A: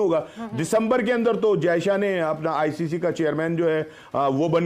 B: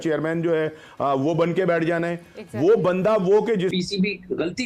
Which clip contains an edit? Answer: B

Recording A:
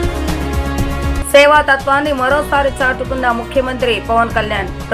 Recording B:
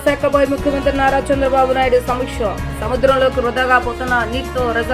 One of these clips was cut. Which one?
A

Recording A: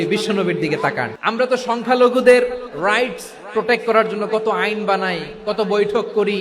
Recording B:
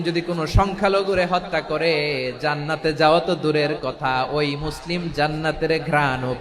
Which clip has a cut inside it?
A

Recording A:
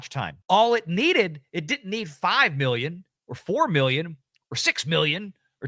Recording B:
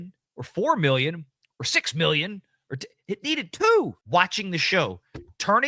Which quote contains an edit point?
B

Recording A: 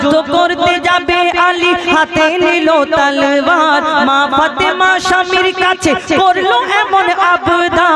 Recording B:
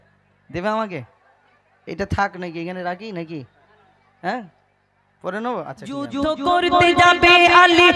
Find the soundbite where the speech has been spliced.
B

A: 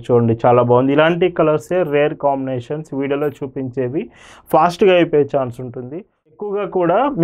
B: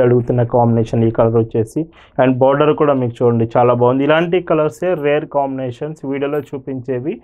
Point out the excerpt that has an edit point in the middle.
A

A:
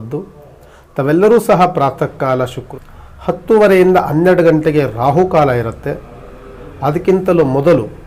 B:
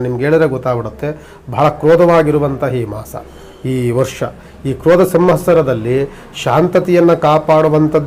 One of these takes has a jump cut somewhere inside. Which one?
A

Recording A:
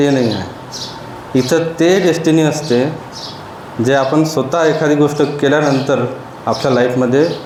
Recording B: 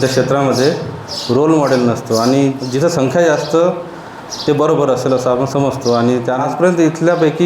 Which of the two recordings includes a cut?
B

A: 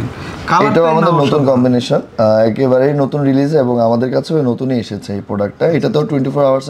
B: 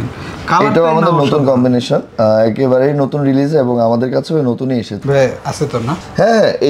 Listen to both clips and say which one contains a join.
B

